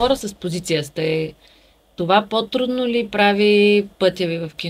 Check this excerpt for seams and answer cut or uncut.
uncut